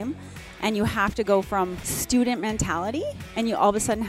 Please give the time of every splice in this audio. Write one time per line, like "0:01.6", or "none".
0:01.8
0:03.2